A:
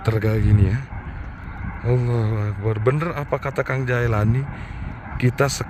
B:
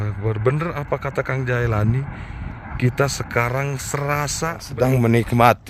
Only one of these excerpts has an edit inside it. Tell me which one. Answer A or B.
B